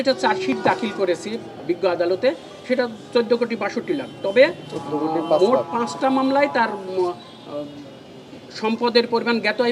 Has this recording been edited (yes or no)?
no